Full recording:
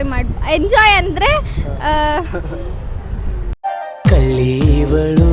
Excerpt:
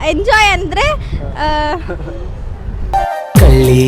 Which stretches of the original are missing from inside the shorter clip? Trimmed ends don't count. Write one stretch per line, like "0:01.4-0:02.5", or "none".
0:03.2-0:03.4